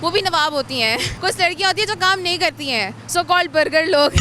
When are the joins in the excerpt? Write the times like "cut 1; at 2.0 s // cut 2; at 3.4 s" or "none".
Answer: cut 1; at 1.1 s